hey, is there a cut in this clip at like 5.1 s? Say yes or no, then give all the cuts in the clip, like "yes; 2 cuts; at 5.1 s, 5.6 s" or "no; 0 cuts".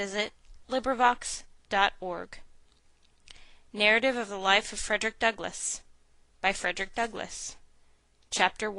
no; 1 cut; at 3.8 s